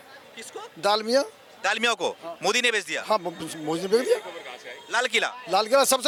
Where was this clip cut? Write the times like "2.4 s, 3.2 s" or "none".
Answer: none